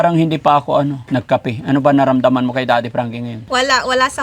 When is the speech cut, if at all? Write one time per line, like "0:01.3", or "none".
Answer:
0:01.0
0:03.5